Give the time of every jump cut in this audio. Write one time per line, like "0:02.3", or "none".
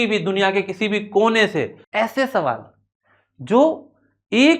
0:01.8